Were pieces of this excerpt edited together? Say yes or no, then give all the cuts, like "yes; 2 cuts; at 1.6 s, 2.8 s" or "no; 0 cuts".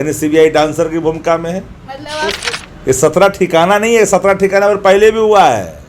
yes; 1 cut; at 2.4 s